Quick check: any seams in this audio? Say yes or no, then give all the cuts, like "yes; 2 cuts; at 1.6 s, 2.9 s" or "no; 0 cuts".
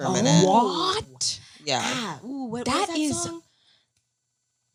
no; 0 cuts